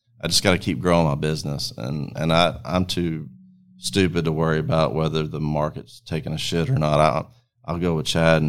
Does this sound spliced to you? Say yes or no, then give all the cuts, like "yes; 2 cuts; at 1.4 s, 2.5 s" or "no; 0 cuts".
no; 0 cuts